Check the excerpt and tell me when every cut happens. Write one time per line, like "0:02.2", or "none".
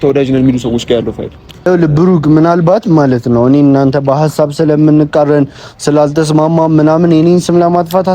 0:01.7